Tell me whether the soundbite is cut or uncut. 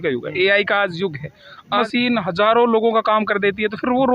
cut